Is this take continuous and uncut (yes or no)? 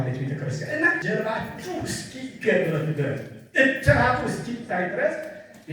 no